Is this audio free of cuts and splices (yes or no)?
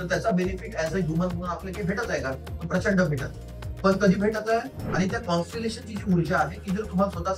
no